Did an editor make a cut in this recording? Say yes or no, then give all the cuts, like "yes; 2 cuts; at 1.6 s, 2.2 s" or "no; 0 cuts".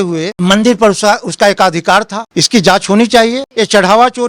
yes; 2 cuts; at 2.3 s, 3.4 s